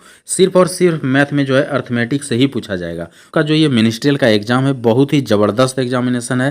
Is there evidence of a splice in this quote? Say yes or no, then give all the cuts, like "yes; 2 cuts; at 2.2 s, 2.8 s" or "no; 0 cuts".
yes; 1 cut; at 3.3 s